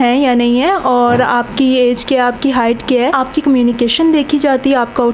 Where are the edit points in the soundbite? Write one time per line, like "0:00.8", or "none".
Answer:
0:03.2